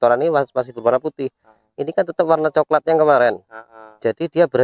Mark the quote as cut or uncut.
uncut